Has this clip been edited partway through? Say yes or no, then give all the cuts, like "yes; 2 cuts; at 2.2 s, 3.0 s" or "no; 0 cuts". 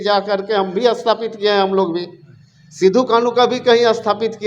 no; 0 cuts